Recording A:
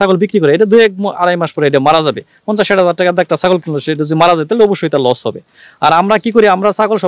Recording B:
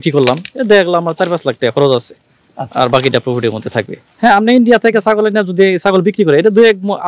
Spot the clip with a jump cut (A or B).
B